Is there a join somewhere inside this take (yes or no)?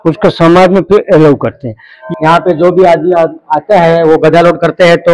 yes